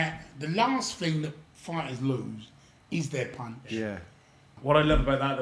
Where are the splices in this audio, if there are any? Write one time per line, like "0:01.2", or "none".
0:04.5